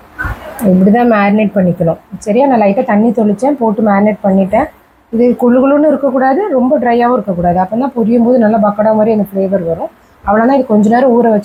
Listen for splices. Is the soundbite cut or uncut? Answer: uncut